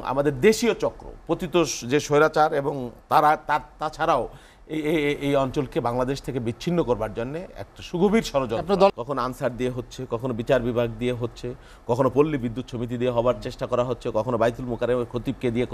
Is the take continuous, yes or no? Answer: no